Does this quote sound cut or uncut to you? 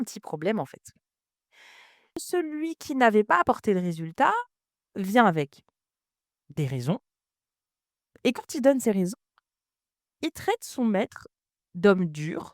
cut